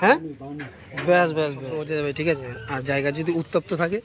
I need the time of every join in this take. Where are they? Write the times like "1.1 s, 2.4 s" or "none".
1.8 s